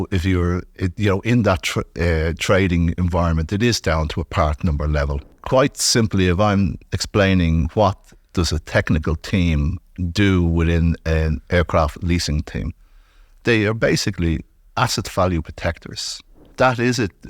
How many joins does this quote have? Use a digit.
2